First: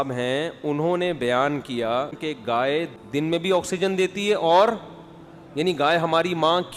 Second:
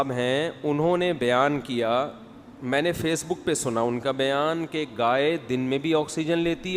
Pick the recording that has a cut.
first; 2 cuts; at 2.2 s, 2.9 s

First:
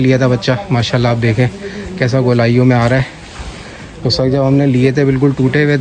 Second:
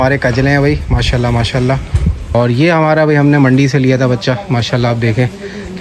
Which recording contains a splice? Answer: second; 1 cut; at 2.3 s

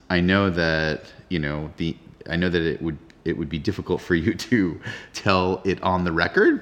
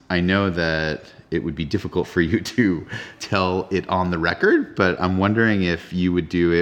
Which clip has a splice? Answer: second; 1 cut; at 1.1 s

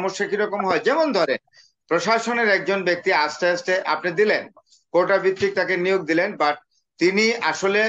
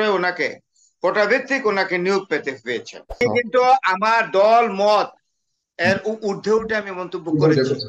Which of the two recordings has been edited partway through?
second; 1 cut; at 3.2 s

